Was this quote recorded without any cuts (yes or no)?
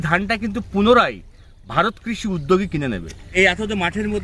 no